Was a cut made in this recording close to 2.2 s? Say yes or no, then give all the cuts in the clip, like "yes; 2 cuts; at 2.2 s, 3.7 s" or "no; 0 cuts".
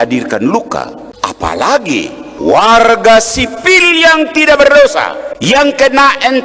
yes; 3 cuts; at 1.0 s, 2.2 s, 5.2 s